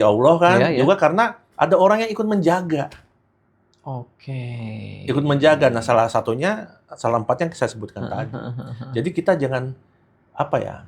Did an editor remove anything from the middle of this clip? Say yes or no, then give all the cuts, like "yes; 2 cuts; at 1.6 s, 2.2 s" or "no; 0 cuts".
no; 0 cuts